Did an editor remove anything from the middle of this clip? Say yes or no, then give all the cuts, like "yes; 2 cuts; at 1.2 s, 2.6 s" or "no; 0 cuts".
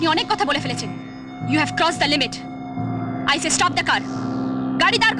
no; 0 cuts